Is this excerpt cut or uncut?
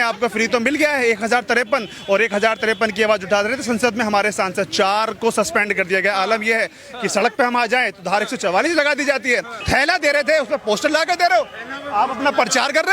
cut